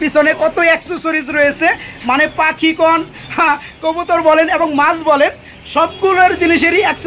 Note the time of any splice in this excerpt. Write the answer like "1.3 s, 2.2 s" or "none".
none

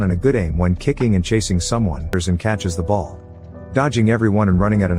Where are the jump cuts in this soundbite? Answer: 2.1 s

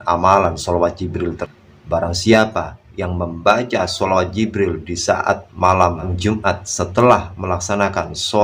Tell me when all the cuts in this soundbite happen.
1.4 s

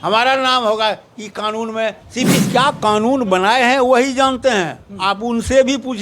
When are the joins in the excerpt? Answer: 2.4 s

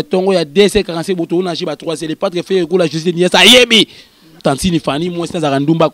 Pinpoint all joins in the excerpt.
4.3 s

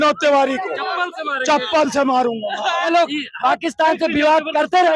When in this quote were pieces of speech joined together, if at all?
2.8 s

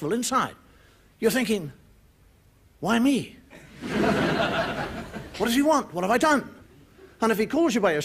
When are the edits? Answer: 1.3 s

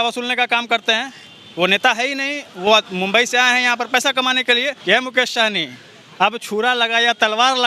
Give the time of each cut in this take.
4.8 s

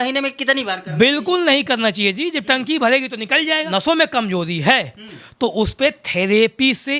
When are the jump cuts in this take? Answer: 3.7 s

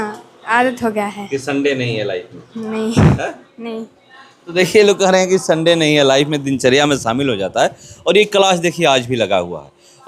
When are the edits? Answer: none

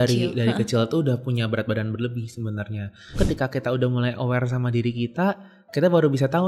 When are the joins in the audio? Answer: 3.2 s

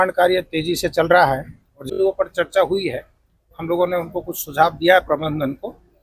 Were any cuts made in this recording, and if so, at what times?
1.8 s

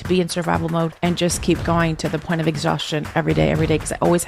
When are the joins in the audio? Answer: 0.9 s

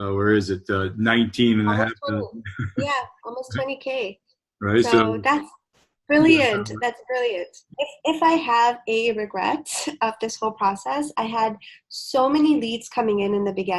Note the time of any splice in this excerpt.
7.7 s

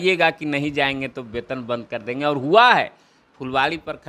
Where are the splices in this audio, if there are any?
none

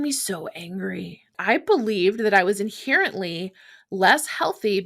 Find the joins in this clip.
1.3 s

